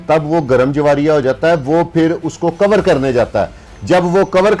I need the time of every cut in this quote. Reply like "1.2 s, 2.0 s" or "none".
none